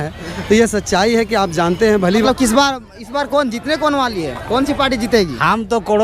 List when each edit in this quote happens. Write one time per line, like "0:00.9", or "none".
0:02.2

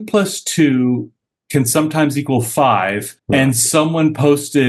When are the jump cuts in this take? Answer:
0:03.1

